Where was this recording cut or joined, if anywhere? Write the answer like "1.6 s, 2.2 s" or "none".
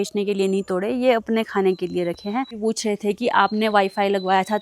2.5 s